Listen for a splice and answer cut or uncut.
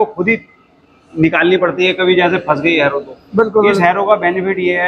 uncut